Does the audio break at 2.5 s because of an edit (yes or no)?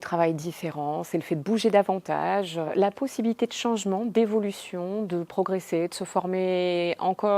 no